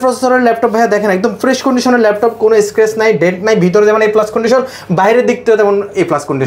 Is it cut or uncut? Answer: uncut